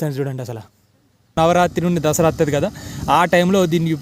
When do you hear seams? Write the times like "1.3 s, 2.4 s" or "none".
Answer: 1.3 s